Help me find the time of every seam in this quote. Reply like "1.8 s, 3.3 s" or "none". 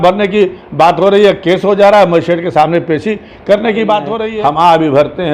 4.2 s